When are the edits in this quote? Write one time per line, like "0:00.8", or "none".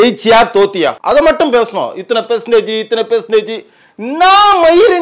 0:01.0